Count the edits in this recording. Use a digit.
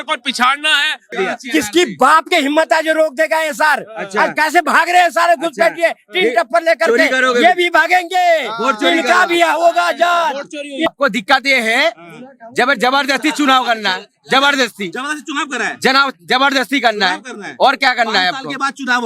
2